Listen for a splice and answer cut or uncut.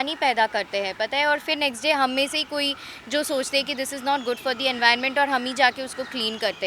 uncut